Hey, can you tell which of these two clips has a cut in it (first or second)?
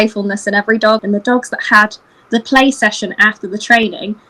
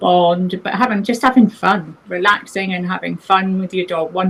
first